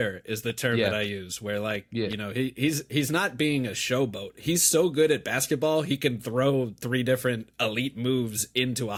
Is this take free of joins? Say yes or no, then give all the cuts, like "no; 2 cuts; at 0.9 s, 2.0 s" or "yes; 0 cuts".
yes; 0 cuts